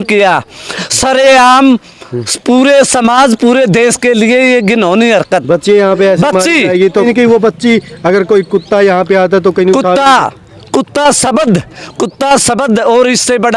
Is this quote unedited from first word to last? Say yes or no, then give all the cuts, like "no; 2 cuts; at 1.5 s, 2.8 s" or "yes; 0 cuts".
no; 2 cuts; at 0.9 s, 7.0 s